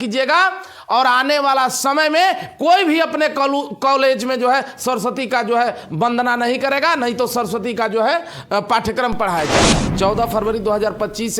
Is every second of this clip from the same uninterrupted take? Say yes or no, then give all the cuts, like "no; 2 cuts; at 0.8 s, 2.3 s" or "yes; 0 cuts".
no; 1 cut; at 9.8 s